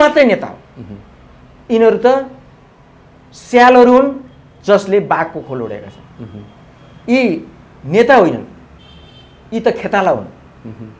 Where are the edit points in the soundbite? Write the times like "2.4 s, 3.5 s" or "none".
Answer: none